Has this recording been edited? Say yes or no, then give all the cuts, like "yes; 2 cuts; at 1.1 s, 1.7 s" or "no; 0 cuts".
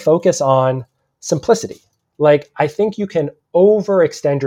no; 0 cuts